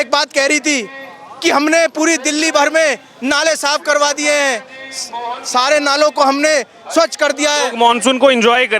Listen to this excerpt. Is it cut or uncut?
uncut